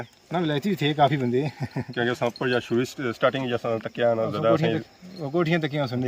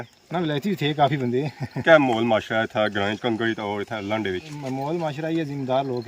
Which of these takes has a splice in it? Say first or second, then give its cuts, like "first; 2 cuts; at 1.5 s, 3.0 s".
second; 2 cuts; at 1.8 s, 4.5 s